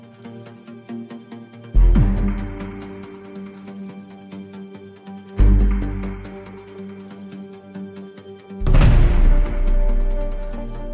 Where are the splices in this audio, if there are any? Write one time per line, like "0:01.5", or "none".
0:04.1